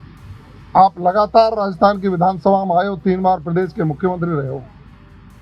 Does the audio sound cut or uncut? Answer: uncut